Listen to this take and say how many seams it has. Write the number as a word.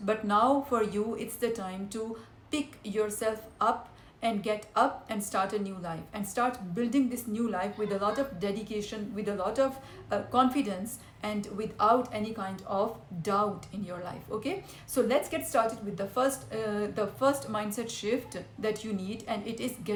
zero